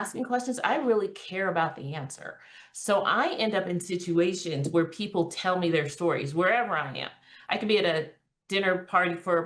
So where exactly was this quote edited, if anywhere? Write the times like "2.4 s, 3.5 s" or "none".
none